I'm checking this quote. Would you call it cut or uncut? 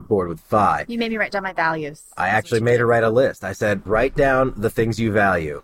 cut